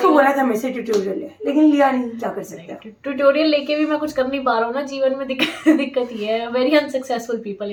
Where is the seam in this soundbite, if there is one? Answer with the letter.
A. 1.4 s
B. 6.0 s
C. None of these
C